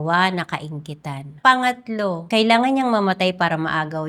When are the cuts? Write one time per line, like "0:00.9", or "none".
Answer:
0:01.3
0:02.2